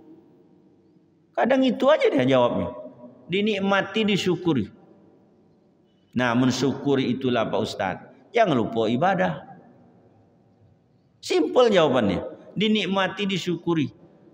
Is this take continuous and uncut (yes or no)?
yes